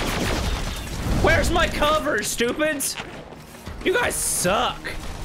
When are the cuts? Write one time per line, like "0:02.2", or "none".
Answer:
none